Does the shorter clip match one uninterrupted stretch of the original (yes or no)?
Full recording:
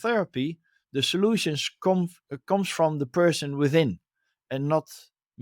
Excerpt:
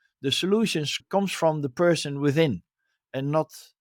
no